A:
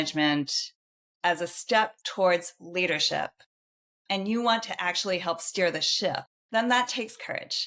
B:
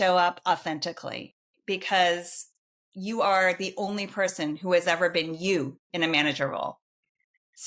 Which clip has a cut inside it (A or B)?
A